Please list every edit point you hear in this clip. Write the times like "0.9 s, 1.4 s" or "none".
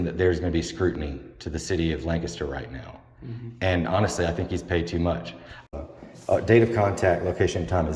5.7 s